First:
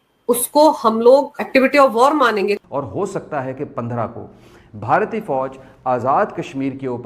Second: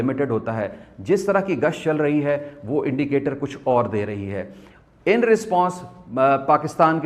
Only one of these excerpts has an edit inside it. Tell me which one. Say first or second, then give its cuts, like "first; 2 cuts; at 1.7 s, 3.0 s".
first; 1 cut; at 2.6 s